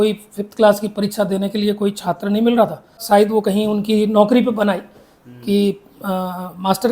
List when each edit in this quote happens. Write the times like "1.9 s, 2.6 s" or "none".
3.0 s